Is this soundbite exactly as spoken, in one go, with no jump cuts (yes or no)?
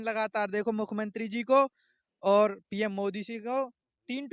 yes